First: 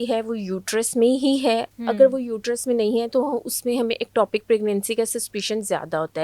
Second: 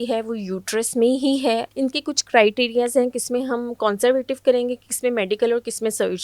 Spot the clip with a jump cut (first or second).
second